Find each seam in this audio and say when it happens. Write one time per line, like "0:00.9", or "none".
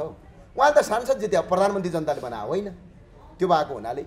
none